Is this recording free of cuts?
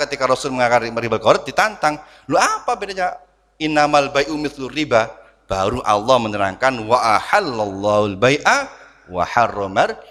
yes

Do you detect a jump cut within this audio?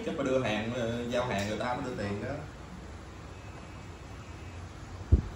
no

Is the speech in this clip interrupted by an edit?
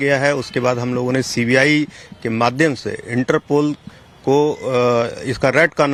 no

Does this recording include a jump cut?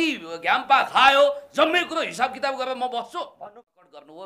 yes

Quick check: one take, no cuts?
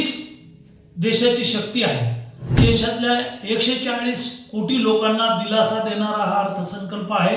no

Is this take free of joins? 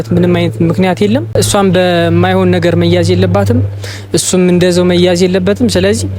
no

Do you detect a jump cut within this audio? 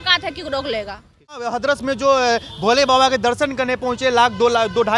yes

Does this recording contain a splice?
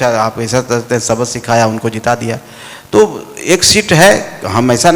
no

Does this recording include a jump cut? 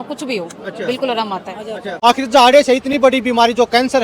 yes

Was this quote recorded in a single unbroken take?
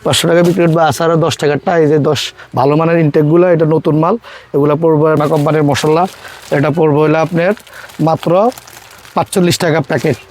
no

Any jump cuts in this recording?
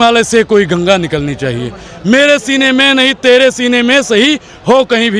no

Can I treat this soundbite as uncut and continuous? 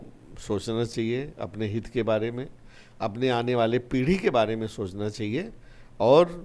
yes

